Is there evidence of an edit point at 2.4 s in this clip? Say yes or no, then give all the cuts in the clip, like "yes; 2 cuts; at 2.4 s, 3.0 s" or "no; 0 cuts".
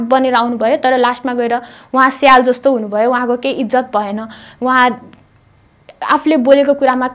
no; 0 cuts